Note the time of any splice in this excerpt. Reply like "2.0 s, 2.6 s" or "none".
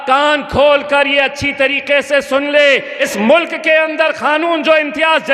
2.9 s